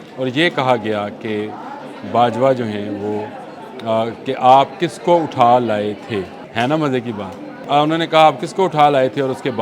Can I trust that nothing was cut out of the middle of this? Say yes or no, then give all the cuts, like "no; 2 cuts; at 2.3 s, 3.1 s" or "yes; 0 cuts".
no; 2 cuts; at 6.4 s, 7.6 s